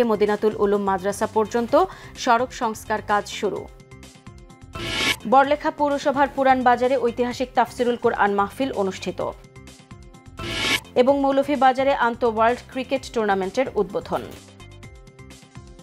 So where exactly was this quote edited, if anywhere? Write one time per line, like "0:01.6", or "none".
none